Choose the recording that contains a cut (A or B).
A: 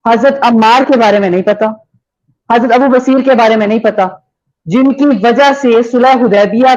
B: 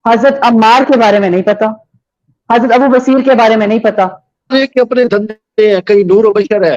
B